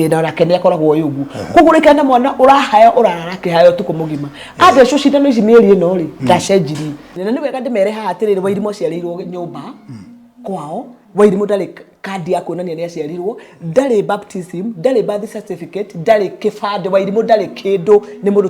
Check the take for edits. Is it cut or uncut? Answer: cut